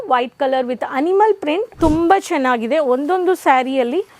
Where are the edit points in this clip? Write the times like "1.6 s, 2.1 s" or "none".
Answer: 1.7 s

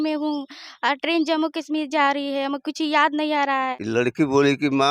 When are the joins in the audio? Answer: 3.8 s

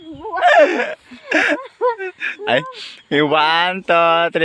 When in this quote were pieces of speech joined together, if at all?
2.8 s

